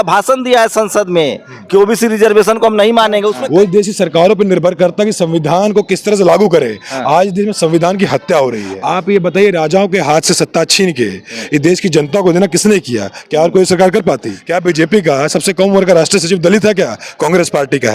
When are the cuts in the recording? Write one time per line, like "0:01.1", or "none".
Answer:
0:03.4
0:08.7
0:14.3